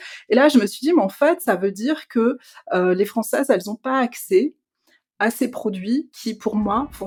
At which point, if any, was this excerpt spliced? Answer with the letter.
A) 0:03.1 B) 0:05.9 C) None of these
C